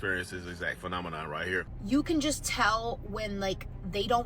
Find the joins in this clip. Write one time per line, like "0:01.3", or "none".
0:01.7